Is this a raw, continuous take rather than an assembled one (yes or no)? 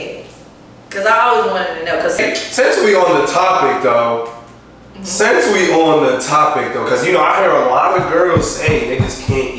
no